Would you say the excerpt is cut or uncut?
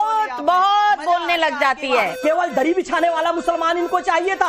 cut